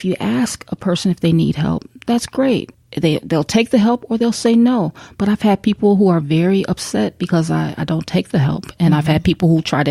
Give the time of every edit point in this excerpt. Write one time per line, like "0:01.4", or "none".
0:02.8